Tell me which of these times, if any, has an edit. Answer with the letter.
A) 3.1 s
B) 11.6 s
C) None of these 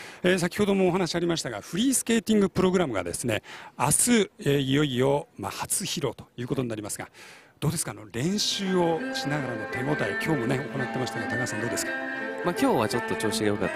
A